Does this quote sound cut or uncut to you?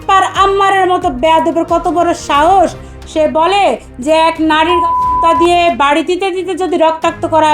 uncut